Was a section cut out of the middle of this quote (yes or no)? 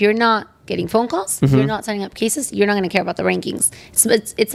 no